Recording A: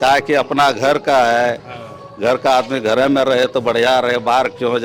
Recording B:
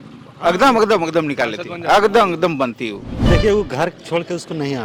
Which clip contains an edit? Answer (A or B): B